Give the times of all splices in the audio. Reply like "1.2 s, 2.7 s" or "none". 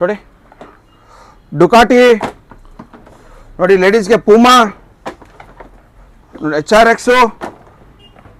none